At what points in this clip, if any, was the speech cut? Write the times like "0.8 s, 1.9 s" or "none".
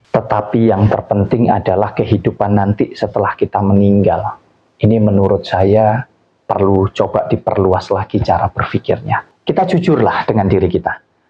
9.3 s